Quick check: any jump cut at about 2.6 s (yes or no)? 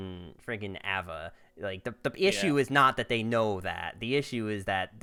no